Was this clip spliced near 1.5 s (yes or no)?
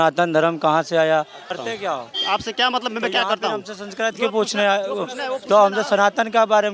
yes